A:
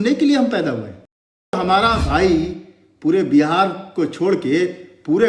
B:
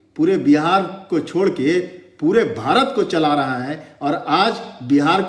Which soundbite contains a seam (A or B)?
A